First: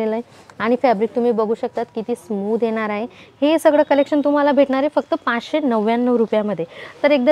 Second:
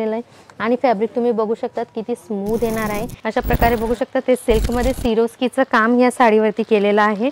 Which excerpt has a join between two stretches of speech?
second; 1 cut; at 3.1 s

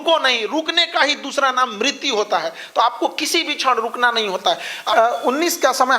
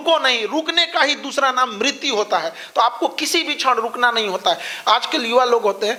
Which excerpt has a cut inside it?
first; 1 cut; at 4.7 s

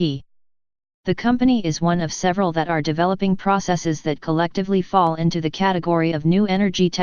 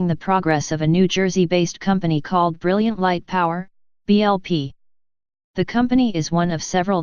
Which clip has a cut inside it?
first; 1 cut; at 4.6 s

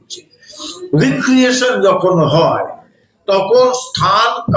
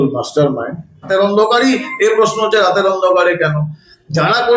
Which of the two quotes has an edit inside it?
second; 1 cut; at 1.1 s

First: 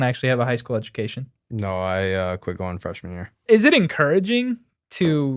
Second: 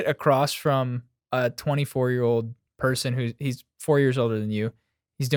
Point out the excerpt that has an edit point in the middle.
first; 1 cut; at 3.5 s

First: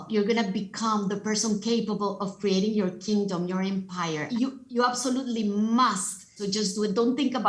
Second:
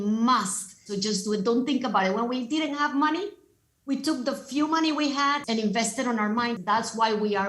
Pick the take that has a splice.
second; 2 cuts; at 5.4 s, 6.6 s

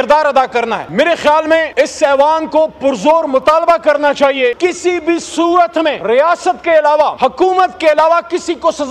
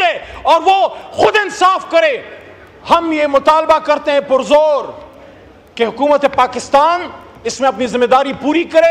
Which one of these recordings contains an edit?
first; 5 cuts; at 0.8 s, 1.7 s, 4.6 s, 6.0 s, 7.1 s

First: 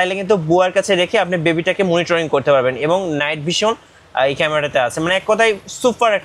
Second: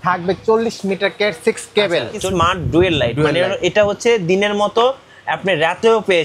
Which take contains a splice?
second; 1 cut; at 2.2 s

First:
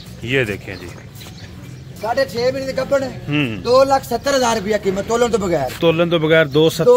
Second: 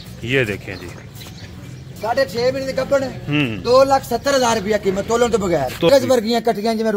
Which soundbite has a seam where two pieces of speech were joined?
second; 1 cut; at 5.9 s

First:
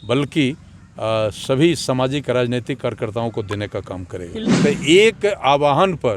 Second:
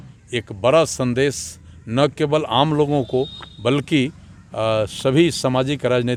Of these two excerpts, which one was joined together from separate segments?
first; 1 cut; at 4.6 s

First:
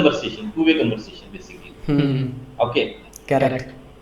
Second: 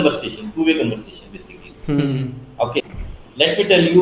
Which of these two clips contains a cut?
second; 1 cut; at 2.8 s

